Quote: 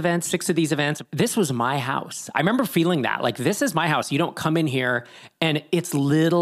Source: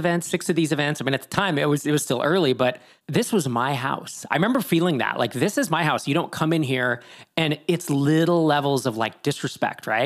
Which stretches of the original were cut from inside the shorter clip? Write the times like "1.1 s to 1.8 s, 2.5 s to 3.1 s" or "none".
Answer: 1.0 s to 2.9 s